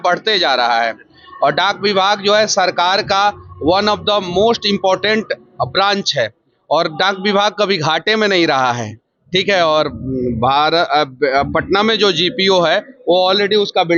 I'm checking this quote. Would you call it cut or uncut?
uncut